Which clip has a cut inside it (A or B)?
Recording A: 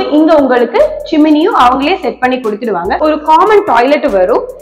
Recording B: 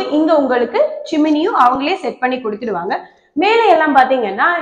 A